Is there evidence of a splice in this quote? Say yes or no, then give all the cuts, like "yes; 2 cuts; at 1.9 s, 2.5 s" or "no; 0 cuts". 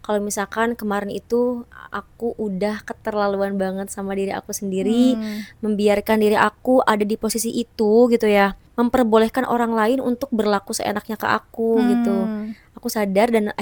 no; 0 cuts